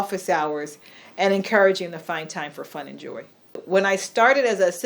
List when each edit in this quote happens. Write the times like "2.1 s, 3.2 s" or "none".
3.6 s